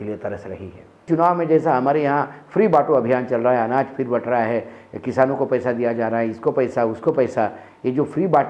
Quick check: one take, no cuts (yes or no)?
no